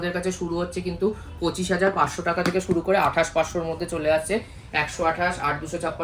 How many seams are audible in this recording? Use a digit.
0